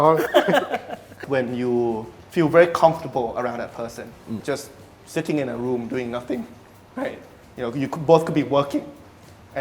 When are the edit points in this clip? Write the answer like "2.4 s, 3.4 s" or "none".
1.2 s

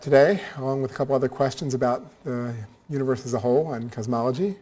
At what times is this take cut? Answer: none

